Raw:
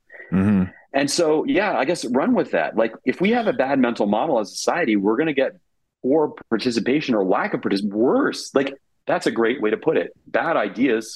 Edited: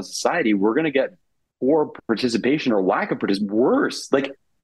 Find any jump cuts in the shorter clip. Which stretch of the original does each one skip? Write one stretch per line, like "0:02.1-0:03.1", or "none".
none